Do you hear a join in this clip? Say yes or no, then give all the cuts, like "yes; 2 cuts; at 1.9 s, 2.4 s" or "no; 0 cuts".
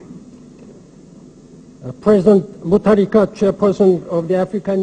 yes; 1 cut; at 3.9 s